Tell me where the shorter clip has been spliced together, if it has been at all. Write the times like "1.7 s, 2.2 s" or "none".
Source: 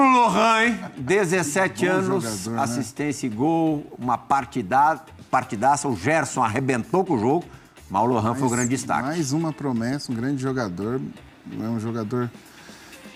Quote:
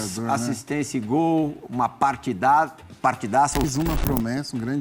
3.7 s